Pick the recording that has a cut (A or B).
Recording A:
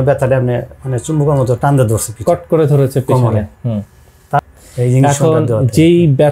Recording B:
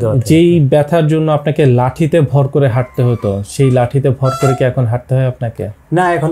A